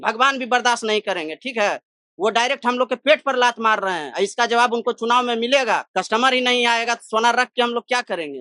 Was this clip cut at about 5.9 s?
yes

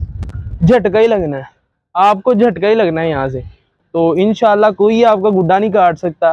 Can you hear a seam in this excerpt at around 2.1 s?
no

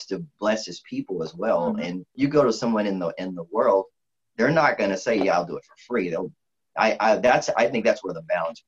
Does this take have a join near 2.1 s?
yes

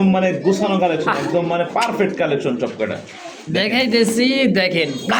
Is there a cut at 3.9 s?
no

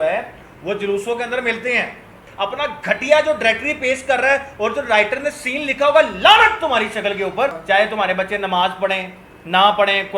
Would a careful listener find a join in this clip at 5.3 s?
no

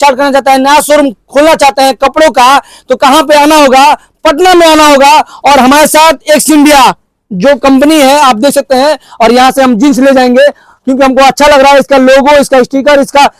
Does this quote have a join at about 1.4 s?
no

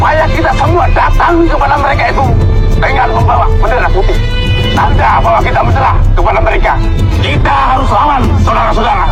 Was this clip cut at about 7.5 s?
no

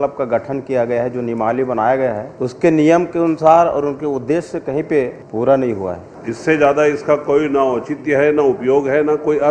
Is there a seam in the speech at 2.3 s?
yes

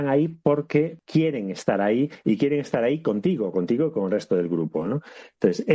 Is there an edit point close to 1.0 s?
yes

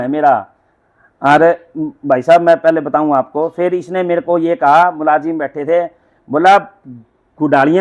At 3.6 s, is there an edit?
yes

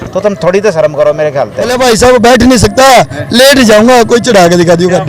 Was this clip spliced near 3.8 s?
no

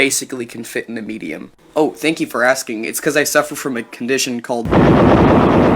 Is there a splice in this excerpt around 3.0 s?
no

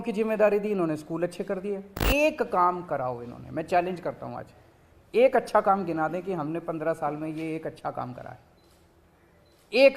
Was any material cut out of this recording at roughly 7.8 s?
no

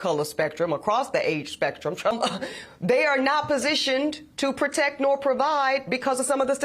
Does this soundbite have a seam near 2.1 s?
yes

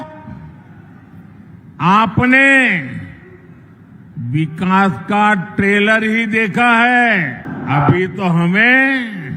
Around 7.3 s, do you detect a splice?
no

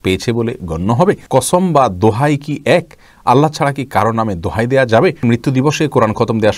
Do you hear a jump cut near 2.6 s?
no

